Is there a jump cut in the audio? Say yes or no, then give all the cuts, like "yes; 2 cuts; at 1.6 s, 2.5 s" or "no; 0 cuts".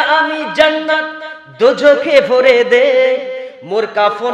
no; 0 cuts